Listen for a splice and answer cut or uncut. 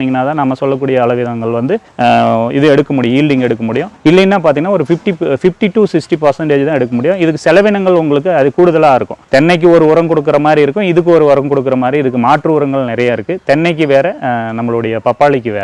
uncut